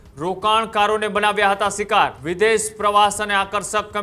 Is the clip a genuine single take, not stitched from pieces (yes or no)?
no